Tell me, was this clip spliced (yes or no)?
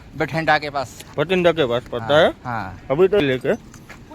yes